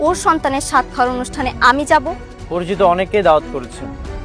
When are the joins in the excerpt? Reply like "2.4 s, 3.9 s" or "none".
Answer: none

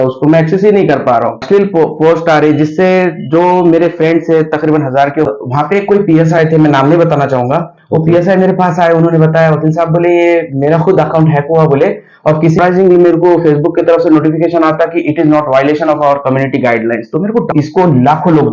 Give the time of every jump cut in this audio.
1.4 s, 5.3 s, 12.6 s, 17.5 s

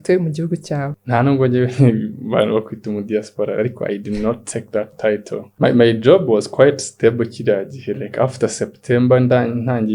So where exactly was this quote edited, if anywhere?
0.9 s, 5.4 s

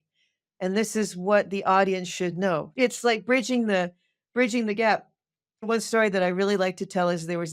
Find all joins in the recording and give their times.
2.7 s, 5.6 s

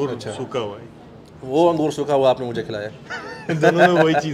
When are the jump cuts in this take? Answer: none

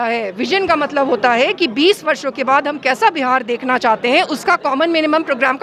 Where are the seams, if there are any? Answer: none

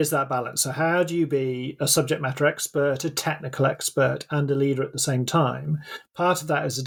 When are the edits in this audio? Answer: none

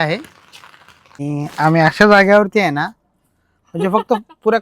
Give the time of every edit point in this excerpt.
1.2 s

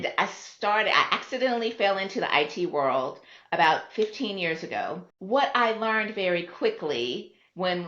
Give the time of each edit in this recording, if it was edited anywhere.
5.1 s

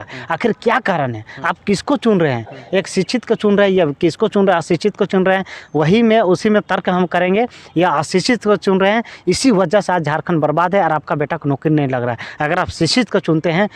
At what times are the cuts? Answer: none

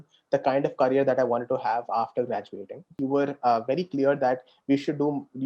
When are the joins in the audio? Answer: 2.9 s

